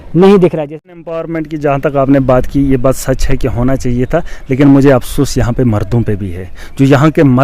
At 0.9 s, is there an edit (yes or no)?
yes